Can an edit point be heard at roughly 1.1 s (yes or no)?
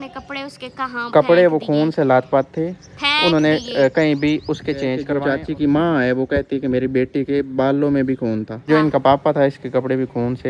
no